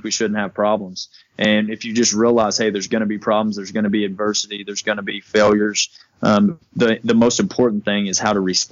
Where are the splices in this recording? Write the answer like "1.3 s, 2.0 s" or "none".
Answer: 6.6 s